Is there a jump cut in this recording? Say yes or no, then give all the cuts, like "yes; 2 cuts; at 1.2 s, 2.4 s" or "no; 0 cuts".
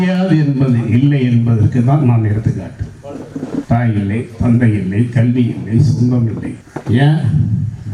yes; 1 cut; at 3.6 s